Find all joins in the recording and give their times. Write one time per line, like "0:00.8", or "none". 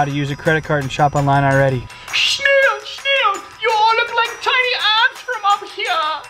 0:01.9